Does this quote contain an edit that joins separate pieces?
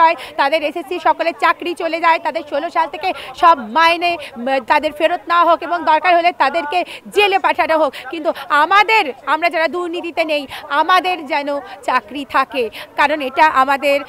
no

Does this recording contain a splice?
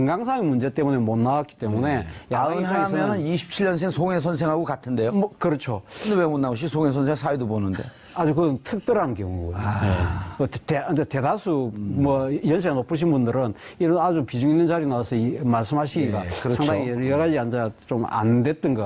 yes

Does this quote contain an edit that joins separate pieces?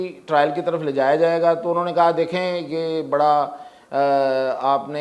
no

